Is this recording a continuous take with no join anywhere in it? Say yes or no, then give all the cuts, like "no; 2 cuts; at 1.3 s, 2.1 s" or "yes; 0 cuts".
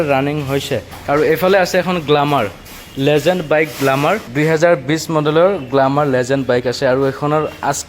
no; 2 cuts; at 0.9 s, 4.3 s